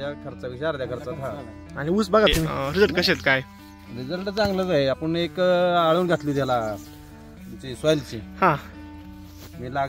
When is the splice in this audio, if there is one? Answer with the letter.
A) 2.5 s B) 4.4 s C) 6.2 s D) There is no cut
A